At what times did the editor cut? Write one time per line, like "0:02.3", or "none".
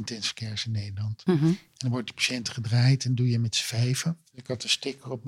0:04.3